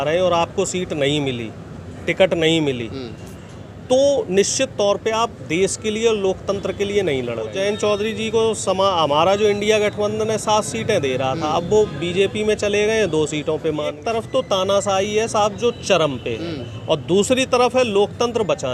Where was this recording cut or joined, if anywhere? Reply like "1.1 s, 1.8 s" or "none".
7.5 s, 14.0 s